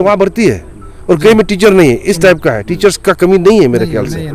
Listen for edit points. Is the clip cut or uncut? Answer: uncut